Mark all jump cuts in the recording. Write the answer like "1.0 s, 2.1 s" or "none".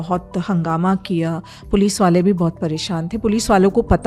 none